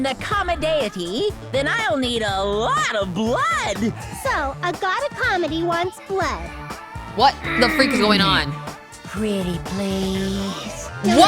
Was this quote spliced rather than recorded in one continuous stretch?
no; 0 cuts

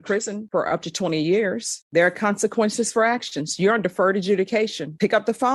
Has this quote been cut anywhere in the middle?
yes; 1 cut; at 1.8 s

